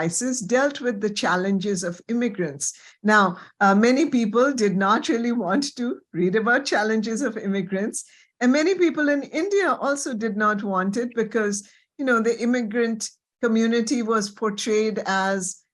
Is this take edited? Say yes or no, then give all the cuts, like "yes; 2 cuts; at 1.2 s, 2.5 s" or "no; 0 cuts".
no; 0 cuts